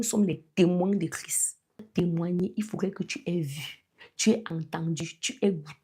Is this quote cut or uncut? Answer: cut